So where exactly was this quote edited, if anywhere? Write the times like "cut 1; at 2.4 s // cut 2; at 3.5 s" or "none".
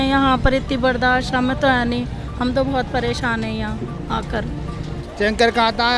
cut 1; at 5.0 s